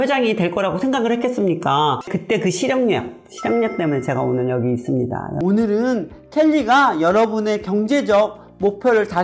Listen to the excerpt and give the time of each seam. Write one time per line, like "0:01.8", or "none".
0:02.1
0:05.3